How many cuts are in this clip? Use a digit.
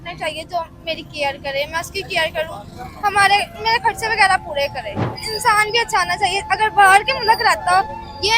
1